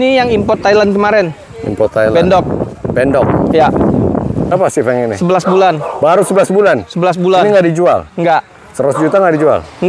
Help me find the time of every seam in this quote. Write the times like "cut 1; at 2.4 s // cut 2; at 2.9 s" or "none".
cut 1; at 4.5 s